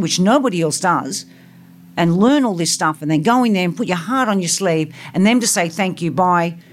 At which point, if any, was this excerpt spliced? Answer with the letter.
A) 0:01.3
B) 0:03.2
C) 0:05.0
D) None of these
D